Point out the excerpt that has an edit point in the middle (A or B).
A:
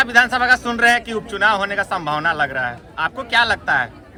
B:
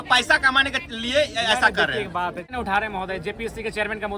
B